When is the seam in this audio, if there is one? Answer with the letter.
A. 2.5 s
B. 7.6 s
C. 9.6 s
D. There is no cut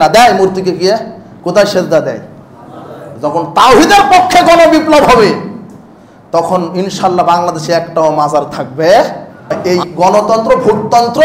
C